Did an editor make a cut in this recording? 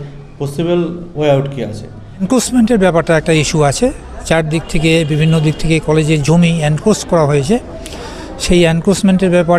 yes; 1 cut; at 2.3 s

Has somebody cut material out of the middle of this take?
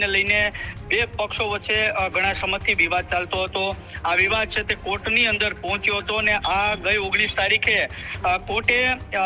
no; 0 cuts

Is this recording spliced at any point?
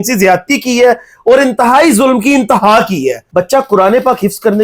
yes; 1 cut; at 3.2 s

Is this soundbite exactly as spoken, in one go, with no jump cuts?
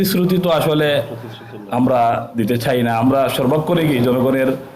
yes; 0 cuts

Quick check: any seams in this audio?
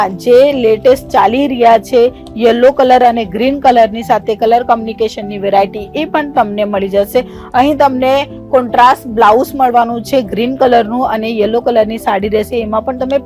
no; 0 cuts

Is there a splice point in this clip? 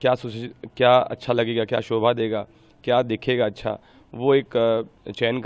no; 0 cuts

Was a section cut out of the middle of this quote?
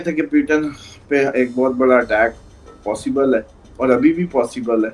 no; 0 cuts

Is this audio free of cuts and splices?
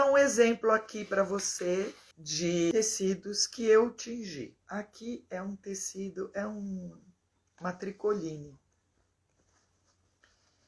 no; 2 cuts; at 2.3 s, 4.6 s

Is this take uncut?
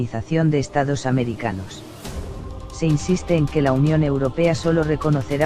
yes; 0 cuts

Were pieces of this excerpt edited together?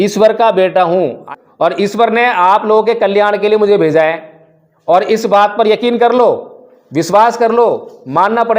yes; 1 cut; at 1.2 s

